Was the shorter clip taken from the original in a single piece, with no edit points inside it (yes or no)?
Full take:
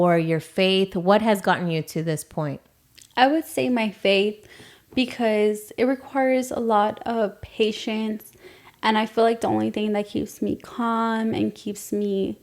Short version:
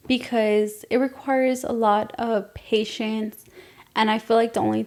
yes